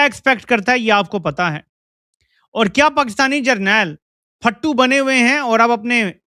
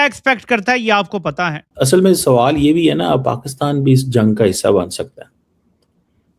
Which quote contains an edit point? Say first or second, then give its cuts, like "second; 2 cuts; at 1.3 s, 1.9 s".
second; 1 cut; at 1.7 s